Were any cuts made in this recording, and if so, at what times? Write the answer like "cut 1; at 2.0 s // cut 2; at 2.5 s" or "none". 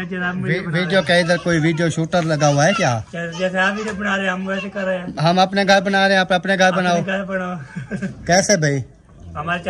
none